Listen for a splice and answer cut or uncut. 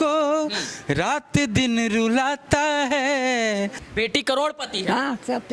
cut